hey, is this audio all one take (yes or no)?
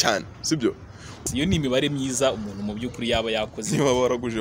no